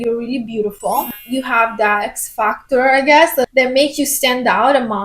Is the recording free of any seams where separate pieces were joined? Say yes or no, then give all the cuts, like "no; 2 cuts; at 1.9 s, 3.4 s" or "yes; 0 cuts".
no; 3 cuts; at 1.1 s, 2.0 s, 3.5 s